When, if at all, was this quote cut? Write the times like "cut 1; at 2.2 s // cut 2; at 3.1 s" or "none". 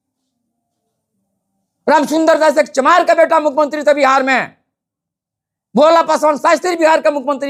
none